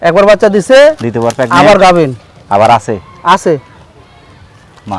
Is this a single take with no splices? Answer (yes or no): yes